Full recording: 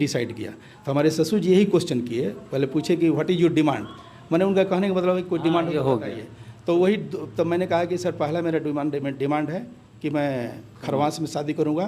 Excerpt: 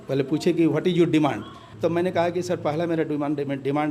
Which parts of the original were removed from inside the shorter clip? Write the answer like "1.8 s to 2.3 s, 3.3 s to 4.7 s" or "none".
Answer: 4.0 s to 7.2 s